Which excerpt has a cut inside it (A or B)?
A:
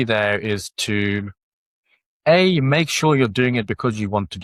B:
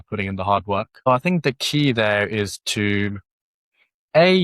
B